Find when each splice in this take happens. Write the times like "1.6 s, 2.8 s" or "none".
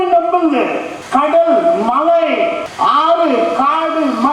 0.9 s, 2.7 s